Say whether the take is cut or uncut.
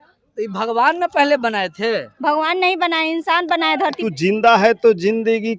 cut